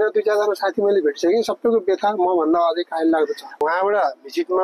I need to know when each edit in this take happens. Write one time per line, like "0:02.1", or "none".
0:03.6